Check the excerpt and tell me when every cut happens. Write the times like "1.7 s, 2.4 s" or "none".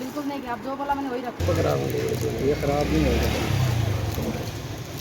1.4 s